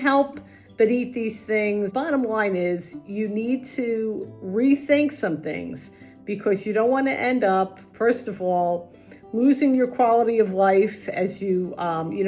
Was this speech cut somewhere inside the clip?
yes; 1 cut; at 1.9 s

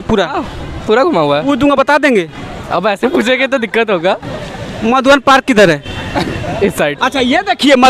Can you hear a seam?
no; 0 cuts

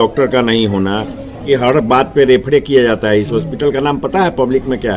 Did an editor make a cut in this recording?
yes; 1 cut; at 1.4 s

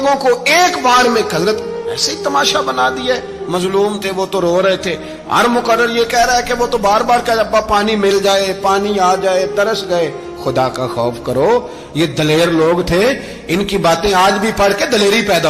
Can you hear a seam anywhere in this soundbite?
no; 0 cuts

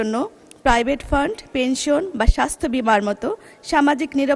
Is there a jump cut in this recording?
no; 0 cuts

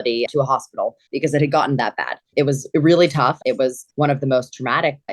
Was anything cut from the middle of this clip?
yes; 2 cuts; at 2.2 s, 3.4 s

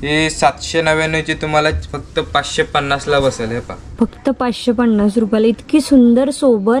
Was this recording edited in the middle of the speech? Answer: no; 0 cuts

